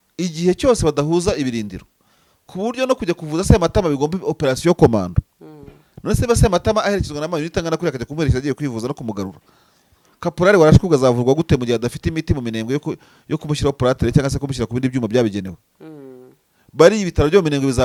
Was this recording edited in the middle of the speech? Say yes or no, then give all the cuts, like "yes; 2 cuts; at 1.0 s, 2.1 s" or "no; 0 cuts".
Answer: no; 0 cuts